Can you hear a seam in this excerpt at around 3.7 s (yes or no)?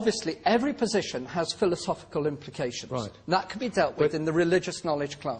no